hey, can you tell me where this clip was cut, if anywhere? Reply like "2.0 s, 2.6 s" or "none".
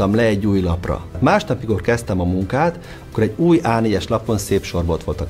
1.2 s